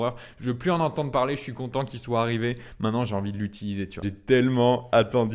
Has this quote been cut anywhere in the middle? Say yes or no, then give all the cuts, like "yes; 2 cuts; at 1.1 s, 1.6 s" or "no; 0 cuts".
yes; 1 cut; at 4.1 s